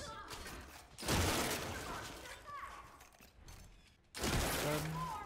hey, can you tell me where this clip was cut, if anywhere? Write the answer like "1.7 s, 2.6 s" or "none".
3.9 s